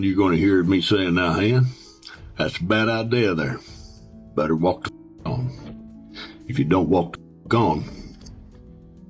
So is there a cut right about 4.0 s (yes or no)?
no